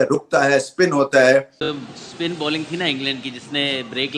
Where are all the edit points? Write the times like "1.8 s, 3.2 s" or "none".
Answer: 1.6 s